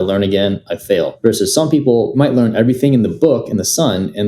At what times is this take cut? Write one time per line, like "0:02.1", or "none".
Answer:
0:01.1
0:02.2